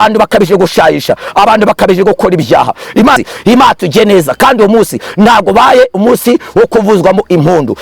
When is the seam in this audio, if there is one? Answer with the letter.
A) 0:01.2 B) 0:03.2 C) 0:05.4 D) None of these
B